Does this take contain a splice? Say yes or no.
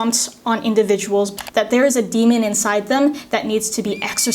yes